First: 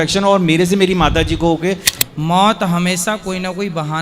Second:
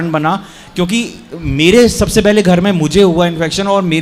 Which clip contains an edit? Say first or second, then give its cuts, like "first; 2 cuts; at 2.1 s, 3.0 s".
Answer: first; 1 cut; at 1.9 s